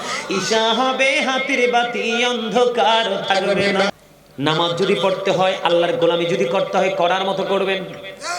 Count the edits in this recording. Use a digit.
1